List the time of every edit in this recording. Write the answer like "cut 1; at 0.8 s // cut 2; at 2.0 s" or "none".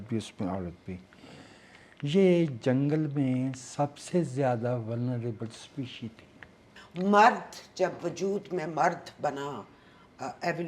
cut 1; at 6.8 s